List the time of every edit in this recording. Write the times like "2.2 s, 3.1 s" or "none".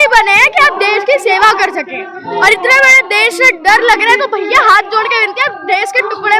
none